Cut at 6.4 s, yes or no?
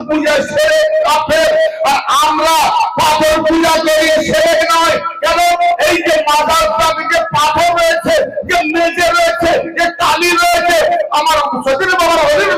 no